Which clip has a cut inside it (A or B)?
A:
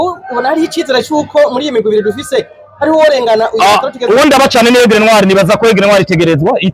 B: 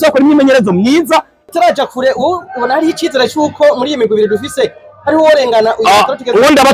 B